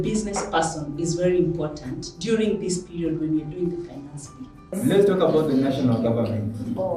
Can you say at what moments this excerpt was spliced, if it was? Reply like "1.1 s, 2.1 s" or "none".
4.8 s